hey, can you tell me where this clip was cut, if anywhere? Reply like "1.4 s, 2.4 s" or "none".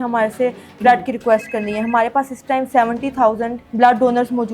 3.6 s